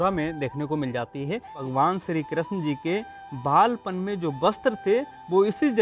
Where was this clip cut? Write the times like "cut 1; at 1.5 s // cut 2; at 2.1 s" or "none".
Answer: cut 1; at 1.6 s